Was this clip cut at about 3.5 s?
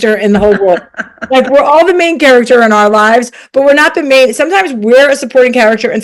no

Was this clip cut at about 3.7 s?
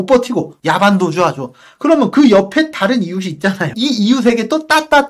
yes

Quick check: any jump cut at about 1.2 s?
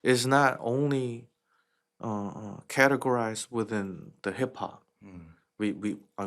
no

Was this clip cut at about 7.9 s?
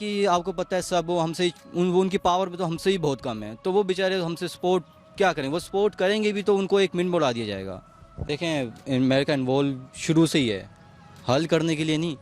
yes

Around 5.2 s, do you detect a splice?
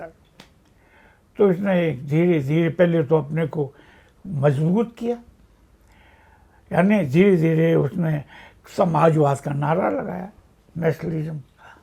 no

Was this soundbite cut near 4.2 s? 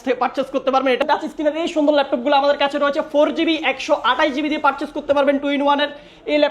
no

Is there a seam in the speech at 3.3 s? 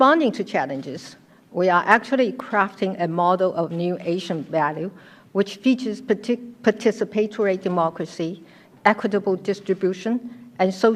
no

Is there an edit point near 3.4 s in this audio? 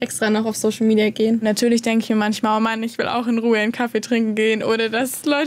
no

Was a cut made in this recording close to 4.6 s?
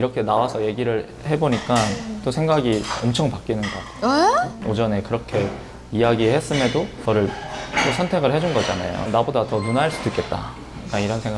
yes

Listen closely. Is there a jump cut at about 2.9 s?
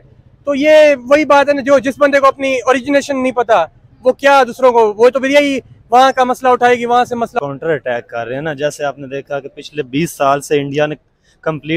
no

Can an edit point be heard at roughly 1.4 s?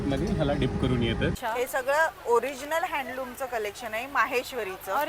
yes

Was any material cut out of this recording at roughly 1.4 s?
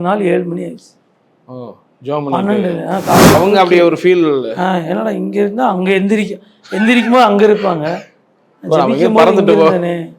no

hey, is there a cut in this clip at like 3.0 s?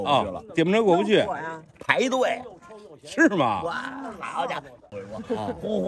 no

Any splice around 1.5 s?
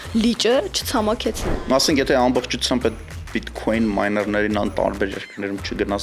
yes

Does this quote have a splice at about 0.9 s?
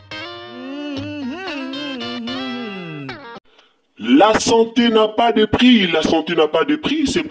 no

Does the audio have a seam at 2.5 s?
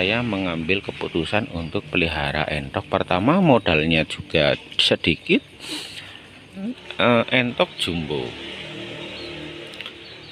no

